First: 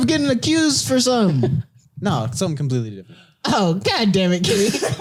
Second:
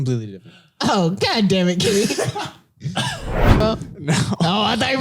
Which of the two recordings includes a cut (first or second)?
second